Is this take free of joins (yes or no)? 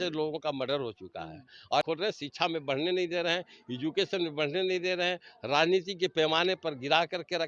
no